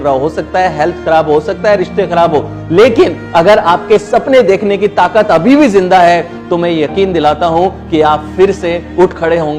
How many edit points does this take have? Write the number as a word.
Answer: zero